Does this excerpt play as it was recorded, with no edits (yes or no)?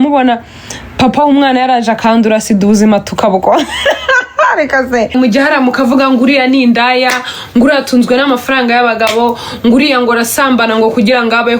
no